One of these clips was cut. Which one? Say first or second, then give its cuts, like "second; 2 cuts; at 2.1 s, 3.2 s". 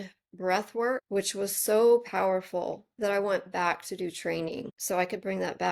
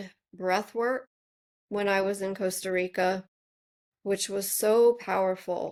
first; 2 cuts; at 1.0 s, 4.7 s